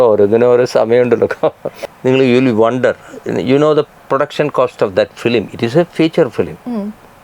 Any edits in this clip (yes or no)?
yes